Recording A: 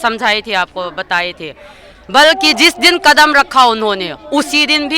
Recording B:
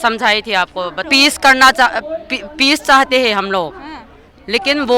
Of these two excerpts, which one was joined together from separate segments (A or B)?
B